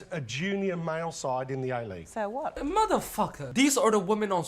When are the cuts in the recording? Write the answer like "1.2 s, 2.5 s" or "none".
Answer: 2.6 s, 3.4 s